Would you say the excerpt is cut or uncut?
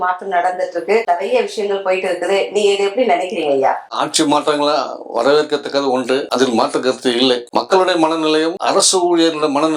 uncut